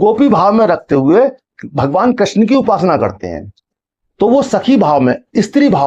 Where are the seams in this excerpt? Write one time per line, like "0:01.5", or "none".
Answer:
none